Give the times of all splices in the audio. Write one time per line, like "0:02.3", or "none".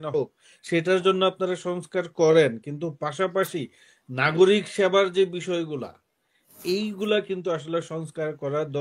none